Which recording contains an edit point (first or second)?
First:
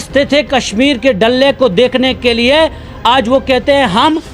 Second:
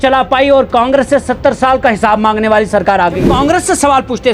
second